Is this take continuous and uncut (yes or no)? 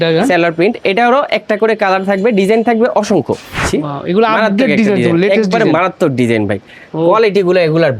no